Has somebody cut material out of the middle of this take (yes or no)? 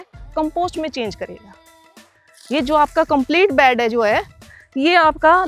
no